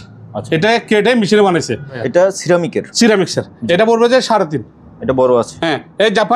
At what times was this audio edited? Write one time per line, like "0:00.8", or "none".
0:02.0